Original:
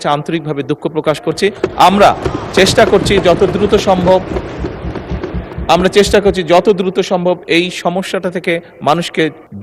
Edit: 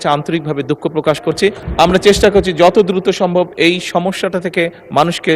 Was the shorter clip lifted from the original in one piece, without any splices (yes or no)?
no